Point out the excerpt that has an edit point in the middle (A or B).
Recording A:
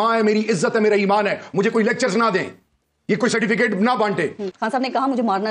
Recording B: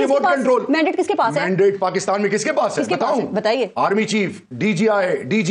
A